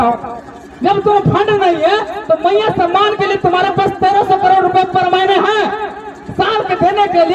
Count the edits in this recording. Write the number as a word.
zero